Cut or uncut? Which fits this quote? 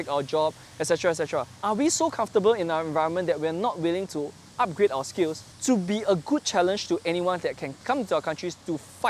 cut